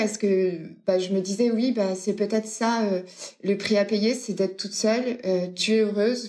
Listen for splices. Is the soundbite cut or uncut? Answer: uncut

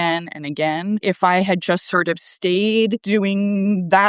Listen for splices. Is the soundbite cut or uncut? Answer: cut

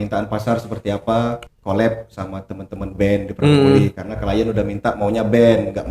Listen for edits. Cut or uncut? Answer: cut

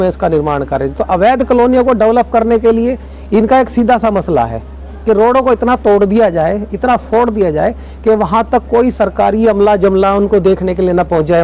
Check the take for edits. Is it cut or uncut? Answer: uncut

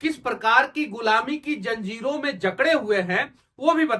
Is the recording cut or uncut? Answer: uncut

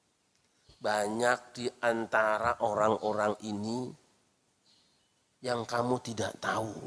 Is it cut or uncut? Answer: uncut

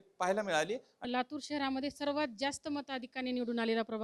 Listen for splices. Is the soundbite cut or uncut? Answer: cut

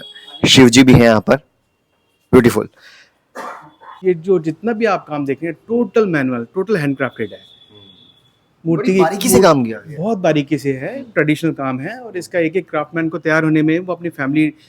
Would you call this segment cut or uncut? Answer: cut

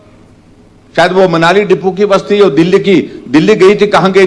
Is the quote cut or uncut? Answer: uncut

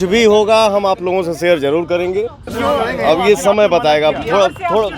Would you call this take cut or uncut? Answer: cut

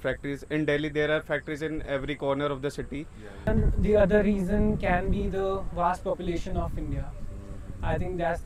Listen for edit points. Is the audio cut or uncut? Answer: cut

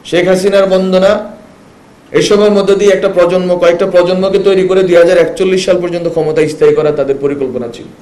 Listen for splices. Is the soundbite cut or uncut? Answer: uncut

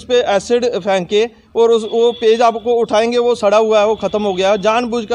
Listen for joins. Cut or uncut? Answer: uncut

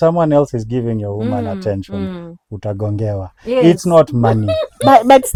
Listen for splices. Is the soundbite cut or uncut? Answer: uncut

